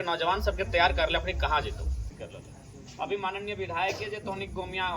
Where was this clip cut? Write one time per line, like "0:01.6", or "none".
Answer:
0:02.1